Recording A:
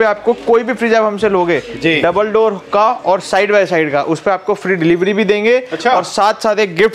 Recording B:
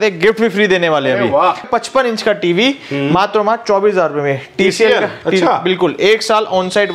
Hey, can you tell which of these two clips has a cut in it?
B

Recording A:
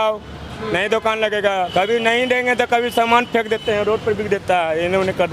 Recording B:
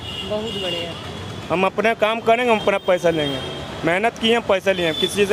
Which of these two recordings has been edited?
A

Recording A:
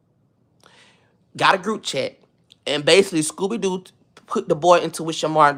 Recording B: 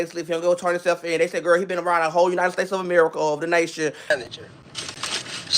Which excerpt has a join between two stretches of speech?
B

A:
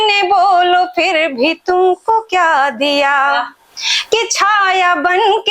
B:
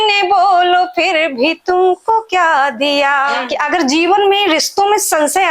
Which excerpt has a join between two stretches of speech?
B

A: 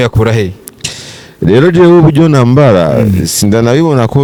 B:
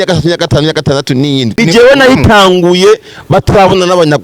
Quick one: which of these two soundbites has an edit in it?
B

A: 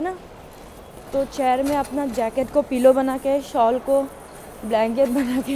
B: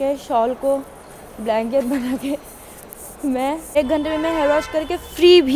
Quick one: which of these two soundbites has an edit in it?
B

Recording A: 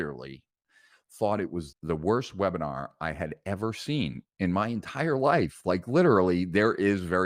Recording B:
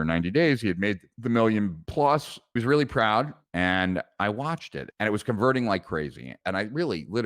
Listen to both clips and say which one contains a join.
B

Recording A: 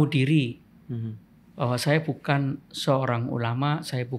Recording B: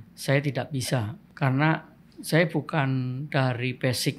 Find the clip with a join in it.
B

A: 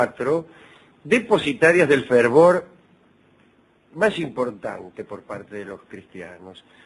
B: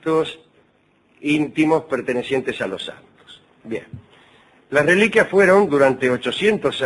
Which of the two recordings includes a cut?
B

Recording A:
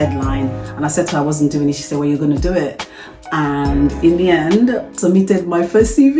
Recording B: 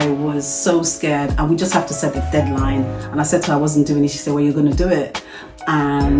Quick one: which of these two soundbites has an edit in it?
A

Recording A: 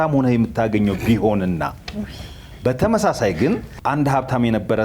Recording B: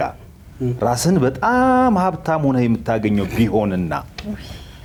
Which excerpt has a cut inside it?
A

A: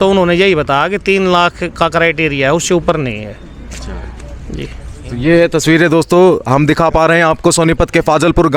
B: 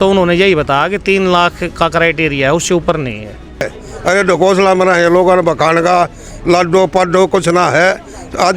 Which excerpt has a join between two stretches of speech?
B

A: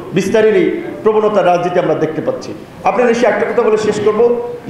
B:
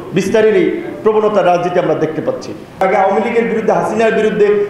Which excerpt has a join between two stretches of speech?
B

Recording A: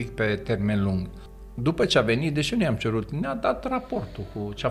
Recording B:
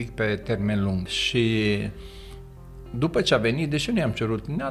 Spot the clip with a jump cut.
A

